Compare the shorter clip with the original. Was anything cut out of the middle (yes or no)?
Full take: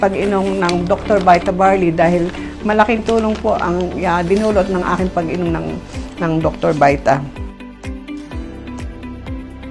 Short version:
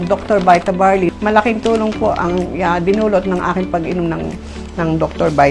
yes